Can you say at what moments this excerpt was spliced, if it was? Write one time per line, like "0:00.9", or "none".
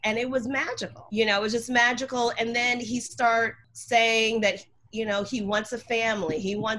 0:01.0
0:03.7